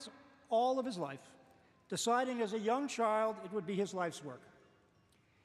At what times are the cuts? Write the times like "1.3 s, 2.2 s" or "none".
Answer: 1.4 s